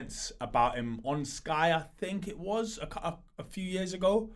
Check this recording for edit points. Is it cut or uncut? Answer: uncut